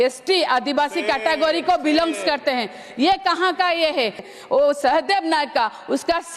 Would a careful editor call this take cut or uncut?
cut